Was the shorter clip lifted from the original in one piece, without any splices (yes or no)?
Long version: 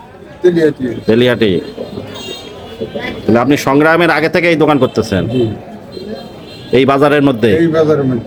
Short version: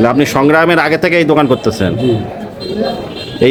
yes